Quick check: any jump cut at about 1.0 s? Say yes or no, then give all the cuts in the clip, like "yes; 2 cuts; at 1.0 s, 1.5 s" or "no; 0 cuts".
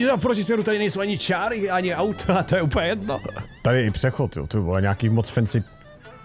no; 1 cut; at 3.4 s